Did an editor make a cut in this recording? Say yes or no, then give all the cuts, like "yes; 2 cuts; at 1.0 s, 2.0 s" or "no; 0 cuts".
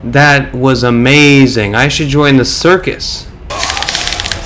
yes; 1 cut; at 3.5 s